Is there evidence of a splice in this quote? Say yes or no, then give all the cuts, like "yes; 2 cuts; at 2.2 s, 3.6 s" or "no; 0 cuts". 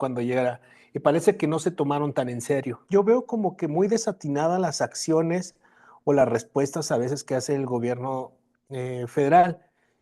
yes; 1 cut; at 2.8 s